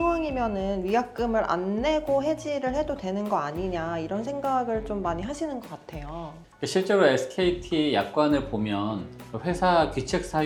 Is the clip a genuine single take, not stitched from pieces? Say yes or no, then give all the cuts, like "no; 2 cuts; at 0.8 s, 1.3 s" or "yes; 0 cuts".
yes; 0 cuts